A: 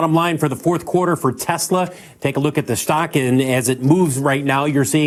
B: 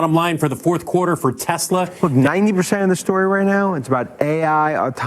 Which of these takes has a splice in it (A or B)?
B